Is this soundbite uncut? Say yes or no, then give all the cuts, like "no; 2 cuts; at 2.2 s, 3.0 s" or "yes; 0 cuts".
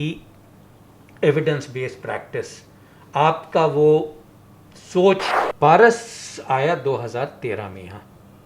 no; 1 cut; at 5.3 s